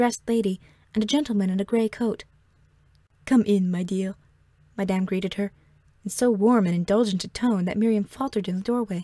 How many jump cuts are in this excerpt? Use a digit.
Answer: 0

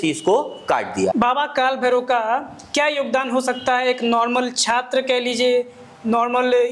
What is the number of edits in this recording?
1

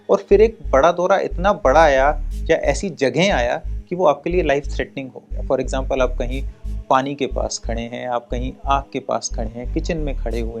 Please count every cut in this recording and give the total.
0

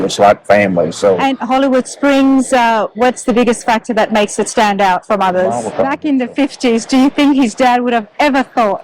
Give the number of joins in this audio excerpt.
2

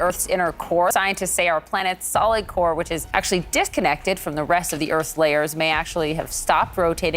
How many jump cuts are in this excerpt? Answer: 1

